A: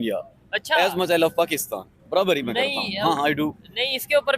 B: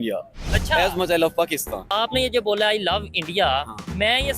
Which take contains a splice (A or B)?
B